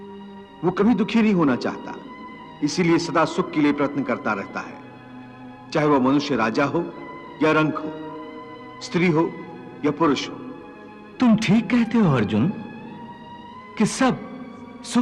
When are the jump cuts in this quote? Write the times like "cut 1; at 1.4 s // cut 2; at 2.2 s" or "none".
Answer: none